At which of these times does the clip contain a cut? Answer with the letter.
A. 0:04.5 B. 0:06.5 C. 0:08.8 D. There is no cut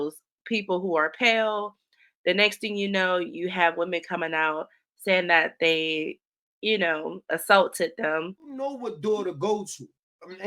C